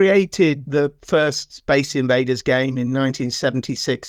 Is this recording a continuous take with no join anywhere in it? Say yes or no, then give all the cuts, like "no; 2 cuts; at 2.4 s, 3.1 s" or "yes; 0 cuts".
yes; 0 cuts